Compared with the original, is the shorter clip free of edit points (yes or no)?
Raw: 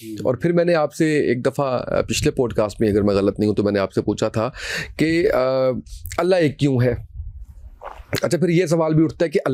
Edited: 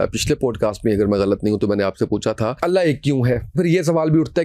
no